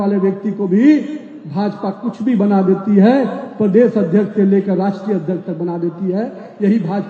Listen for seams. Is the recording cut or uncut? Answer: uncut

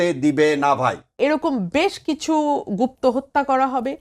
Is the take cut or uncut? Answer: cut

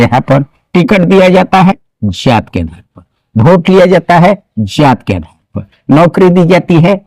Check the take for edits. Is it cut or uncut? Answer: uncut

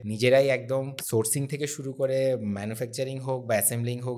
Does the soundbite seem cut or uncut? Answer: cut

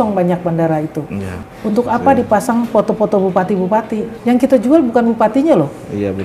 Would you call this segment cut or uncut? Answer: cut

